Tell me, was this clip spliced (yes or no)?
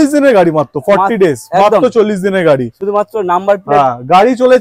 no